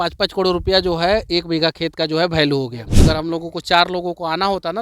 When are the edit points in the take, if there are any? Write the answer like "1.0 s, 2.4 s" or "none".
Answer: 2.9 s